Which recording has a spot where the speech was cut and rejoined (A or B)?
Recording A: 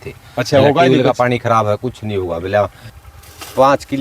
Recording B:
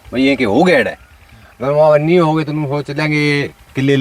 A